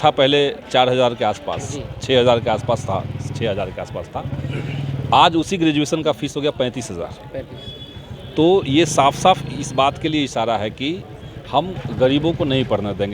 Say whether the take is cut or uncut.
uncut